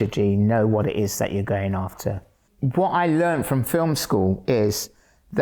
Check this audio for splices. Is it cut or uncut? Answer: cut